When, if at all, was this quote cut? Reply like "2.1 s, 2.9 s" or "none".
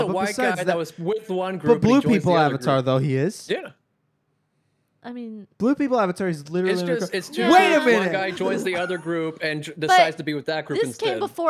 none